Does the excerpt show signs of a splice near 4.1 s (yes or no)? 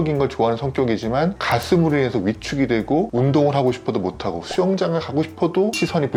no